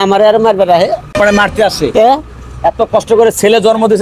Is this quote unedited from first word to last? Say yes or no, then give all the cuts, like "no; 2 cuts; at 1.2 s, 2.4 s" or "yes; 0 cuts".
no; 1 cut; at 1.1 s